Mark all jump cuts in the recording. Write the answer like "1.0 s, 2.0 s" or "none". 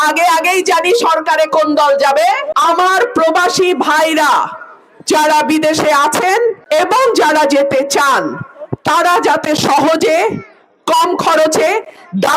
2.5 s